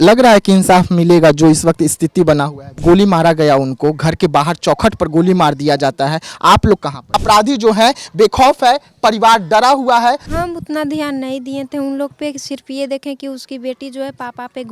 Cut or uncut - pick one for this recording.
cut